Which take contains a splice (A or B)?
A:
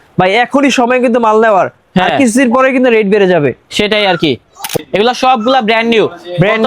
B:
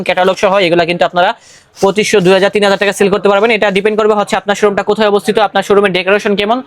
A